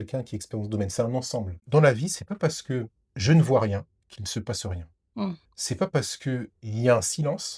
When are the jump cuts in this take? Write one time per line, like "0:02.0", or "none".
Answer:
0:01.6